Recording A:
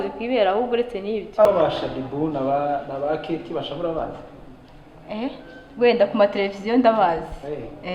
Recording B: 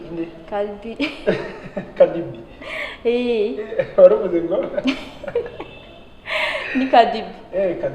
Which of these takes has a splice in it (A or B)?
A